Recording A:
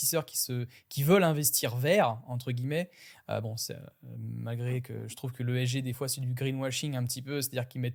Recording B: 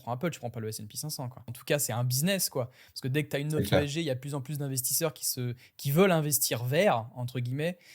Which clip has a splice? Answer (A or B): B